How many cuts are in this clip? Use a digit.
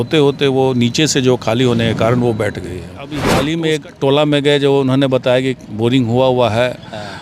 1